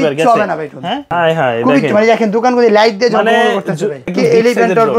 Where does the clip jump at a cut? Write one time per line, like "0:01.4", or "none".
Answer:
0:01.1
0:04.1